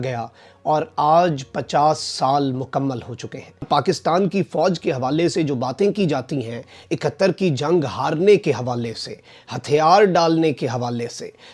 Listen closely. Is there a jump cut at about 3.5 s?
no; 0 cuts

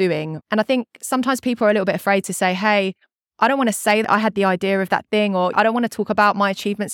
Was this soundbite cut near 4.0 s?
yes; 1 cut; at 4.0 s

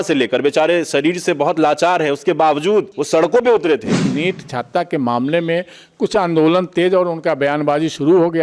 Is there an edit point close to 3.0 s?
yes; 2 cuts; at 3.0 s, 4.1 s

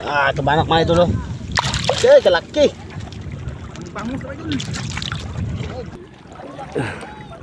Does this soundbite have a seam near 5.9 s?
yes; 1 cut; at 5.9 s

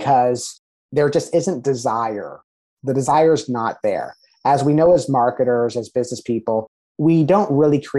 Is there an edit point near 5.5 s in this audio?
no; 0 cuts

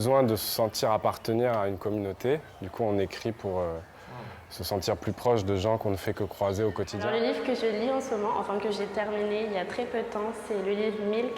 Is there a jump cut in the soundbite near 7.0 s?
yes; 1 cut; at 7.0 s

